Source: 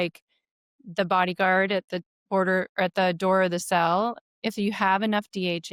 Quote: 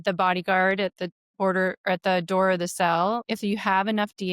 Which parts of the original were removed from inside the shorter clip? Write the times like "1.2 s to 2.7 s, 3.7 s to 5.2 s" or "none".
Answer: 4.2 s to 4.4 s